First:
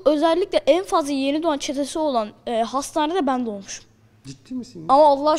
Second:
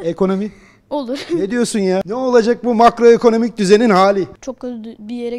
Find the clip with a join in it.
second; 2 cuts; at 2.0 s, 4.4 s

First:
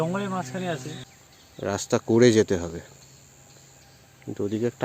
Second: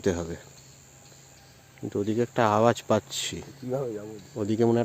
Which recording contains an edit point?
first; 1 cut; at 1.1 s

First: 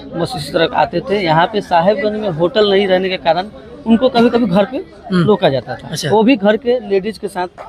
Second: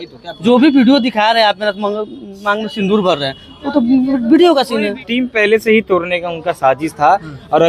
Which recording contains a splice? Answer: second; 1 cut; at 5.0 s

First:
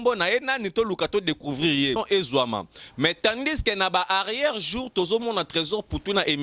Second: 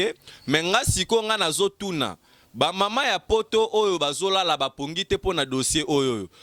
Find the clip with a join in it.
first; 1 cut; at 2.0 s

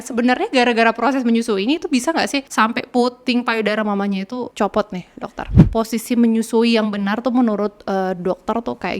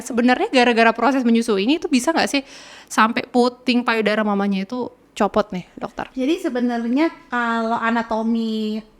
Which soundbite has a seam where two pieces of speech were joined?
first; 3 cuts; at 2.5 s, 4.5 s, 5.5 s

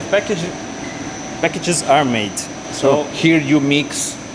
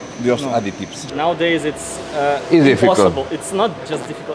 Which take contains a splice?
second; 1 cut; at 0.9 s

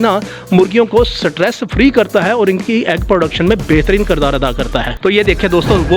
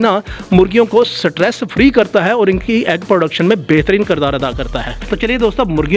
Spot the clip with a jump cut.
first; 1 cut; at 4.9 s

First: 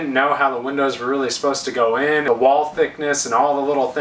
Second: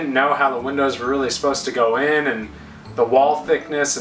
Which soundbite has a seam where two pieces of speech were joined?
first; 1 cut; at 2.2 s

